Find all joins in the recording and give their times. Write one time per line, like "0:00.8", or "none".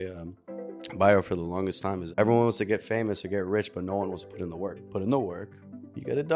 0:02.0
0:04.8